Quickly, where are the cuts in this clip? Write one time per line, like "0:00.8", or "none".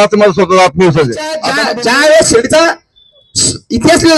0:01.4